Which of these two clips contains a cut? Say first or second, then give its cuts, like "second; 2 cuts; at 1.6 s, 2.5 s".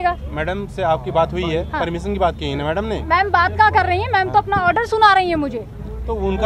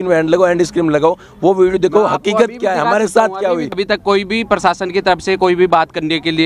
second; 1 cut; at 3.8 s